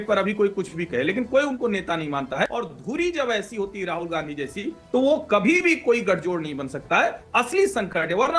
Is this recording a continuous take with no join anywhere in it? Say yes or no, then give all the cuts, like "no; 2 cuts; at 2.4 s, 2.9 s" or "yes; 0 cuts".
yes; 0 cuts